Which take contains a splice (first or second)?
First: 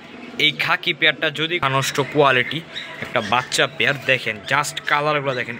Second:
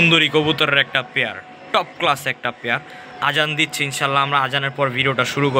first